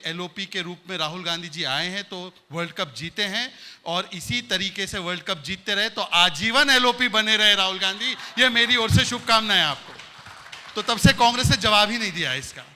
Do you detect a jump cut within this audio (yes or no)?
no